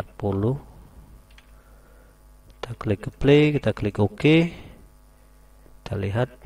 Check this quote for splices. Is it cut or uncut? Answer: uncut